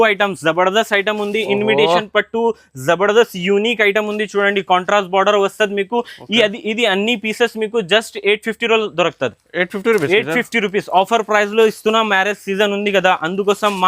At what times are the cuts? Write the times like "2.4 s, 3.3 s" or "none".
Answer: none